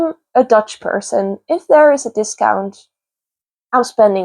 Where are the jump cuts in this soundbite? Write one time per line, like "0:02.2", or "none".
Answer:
none